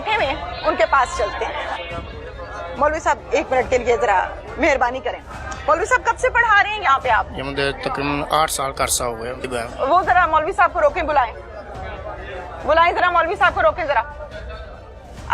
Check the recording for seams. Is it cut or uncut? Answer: cut